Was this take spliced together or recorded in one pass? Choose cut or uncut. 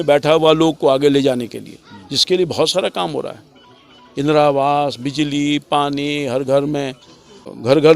uncut